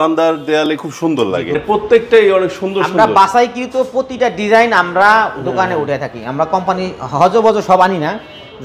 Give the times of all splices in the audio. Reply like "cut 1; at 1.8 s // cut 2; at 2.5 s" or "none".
cut 1; at 1.6 s